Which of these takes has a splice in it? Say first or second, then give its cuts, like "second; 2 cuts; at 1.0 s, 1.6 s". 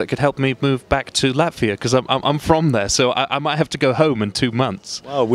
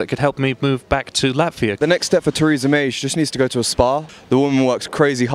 second; 2 cuts; at 1.8 s, 4.1 s